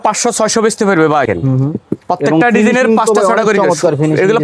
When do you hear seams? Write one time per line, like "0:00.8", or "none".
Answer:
0:01.2